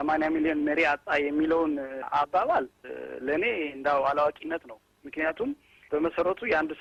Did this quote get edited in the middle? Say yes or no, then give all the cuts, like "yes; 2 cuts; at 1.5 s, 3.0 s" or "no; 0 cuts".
no; 0 cuts